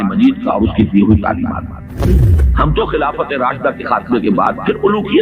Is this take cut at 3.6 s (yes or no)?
no